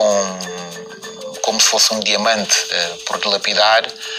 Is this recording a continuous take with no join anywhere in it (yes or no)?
yes